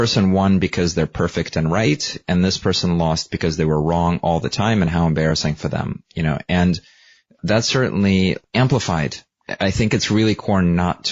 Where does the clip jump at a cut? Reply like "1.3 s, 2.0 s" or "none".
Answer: none